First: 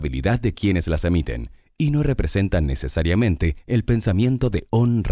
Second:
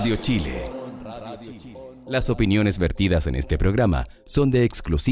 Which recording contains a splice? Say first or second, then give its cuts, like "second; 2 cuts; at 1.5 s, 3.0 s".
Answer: second; 1 cut; at 2.0 s